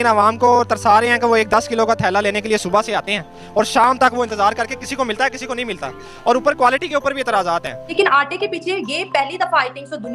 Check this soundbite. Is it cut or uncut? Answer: cut